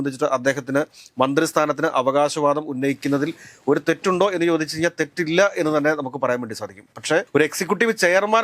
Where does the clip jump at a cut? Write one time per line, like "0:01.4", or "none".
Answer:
none